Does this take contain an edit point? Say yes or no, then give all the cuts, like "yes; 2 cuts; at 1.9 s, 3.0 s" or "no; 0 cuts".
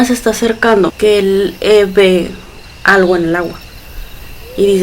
yes; 1 cut; at 0.9 s